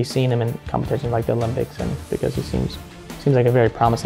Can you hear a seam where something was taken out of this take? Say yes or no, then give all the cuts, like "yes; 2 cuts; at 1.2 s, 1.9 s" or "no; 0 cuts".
yes; 1 cut; at 2.0 s